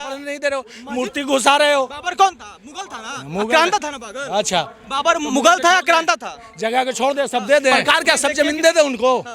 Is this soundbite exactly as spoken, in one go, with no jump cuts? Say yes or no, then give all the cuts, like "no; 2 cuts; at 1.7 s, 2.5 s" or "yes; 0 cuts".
no; 1 cut; at 7.8 s